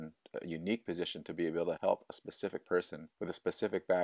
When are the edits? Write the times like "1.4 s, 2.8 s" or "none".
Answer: 1.8 s, 3.0 s